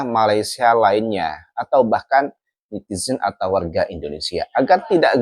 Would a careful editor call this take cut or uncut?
uncut